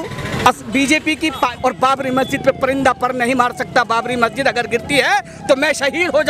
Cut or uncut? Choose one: cut